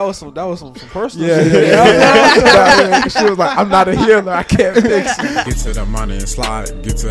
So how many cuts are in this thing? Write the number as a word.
one